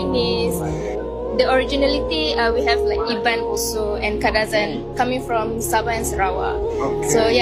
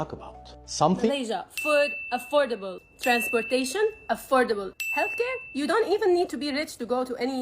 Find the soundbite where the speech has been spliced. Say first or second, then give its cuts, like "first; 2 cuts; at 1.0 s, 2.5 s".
second; 1 cut; at 1.1 s